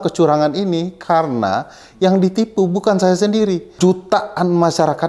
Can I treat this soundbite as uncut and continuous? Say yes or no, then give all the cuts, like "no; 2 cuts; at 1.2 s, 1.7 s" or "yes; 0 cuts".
no; 1 cut; at 3.7 s